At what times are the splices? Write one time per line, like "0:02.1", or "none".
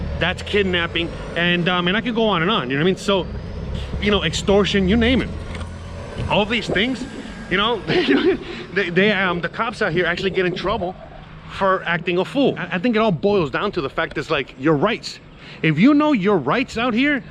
0:12.7